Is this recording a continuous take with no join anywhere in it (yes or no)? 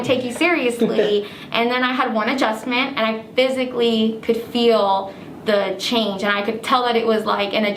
yes